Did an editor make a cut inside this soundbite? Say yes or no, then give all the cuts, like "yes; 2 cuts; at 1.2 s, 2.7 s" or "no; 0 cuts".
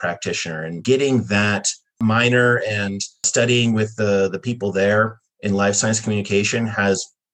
yes; 3 cuts; at 0.8 s, 2.0 s, 3.3 s